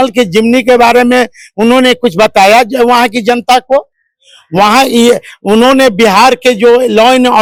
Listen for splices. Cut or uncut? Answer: uncut